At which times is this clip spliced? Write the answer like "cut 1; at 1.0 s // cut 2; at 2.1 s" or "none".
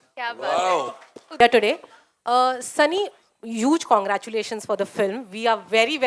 cut 1; at 1.4 s